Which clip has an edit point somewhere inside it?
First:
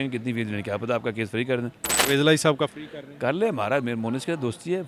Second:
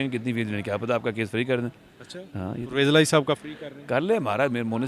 first; 1 cut; at 1.9 s

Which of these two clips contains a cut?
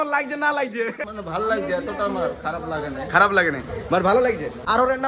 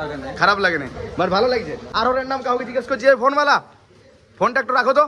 first; 1 cut; at 1.1 s

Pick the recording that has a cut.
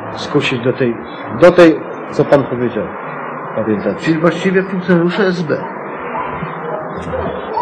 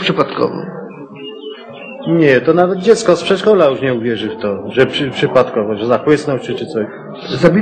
second; 1 cut; at 6.7 s

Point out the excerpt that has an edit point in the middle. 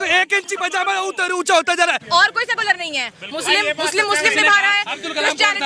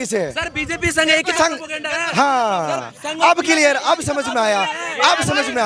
first; 1 cut; at 2.0 s

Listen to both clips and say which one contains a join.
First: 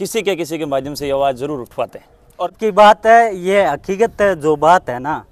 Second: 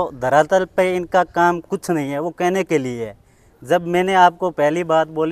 first; 1 cut; at 2.6 s

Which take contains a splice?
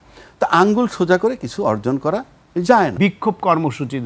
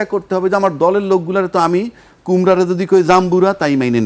first; 1 cut; at 2.9 s

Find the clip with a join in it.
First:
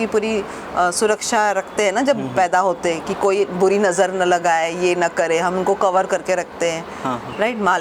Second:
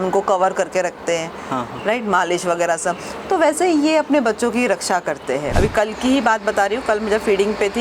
second; 1 cut; at 5.5 s

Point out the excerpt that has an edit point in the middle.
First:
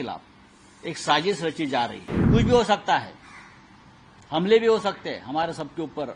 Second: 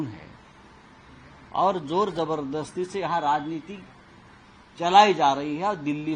first; 1 cut; at 2.1 s

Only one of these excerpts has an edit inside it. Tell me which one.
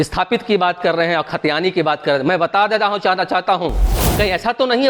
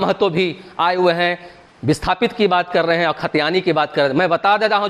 first; 1 cut; at 4.0 s

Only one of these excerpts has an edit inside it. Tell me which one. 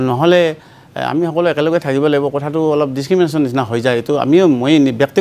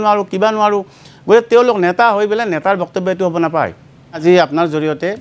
second; 1 cut; at 4.2 s

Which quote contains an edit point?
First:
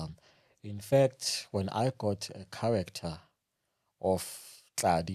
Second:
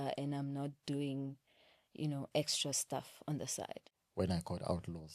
second; 1 cut; at 3.9 s

